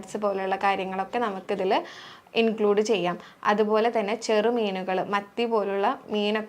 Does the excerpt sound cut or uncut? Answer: uncut